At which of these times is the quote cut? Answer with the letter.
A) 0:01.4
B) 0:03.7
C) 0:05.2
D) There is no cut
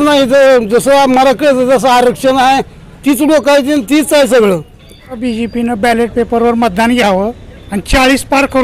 C